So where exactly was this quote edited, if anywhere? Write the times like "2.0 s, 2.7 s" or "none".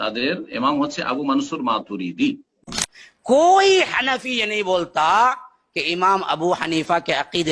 2.9 s